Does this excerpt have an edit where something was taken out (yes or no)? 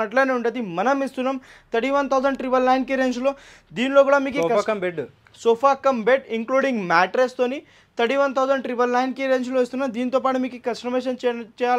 no